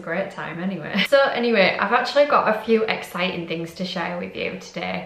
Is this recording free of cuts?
yes; 0 cuts

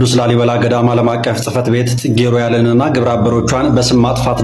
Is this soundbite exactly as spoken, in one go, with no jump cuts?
yes; 0 cuts

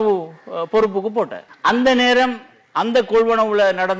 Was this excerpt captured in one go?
no; 1 cut; at 1.4 s

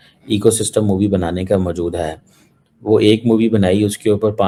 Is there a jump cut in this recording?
no; 0 cuts

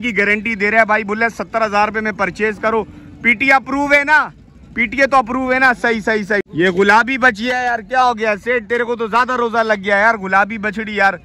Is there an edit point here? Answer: yes; 1 cut; at 6.5 s

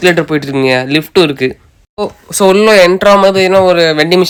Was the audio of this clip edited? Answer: no; 0 cuts

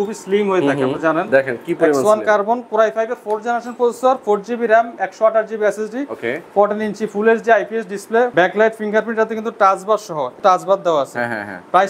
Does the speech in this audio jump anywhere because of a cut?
yes; 2 cuts; at 8.3 s, 10.3 s

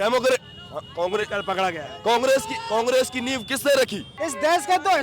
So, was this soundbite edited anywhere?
yes; 1 cut; at 4.1 s

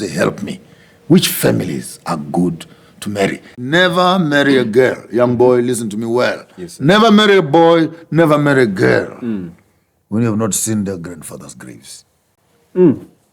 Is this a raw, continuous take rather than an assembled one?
no; 1 cut; at 3.5 s

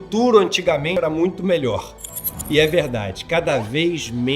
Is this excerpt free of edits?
no; 1 cut; at 0.9 s

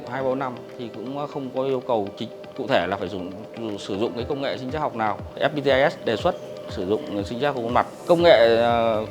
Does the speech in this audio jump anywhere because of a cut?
yes; 2 cuts; at 5.4 s, 8.0 s

